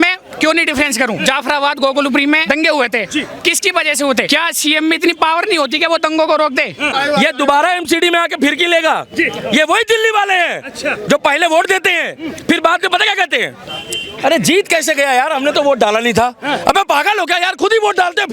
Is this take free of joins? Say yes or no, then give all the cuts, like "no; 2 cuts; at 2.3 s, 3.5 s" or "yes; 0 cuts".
no; 4 cuts; at 1.2 s, 2.4 s, 4.3 s, 6.9 s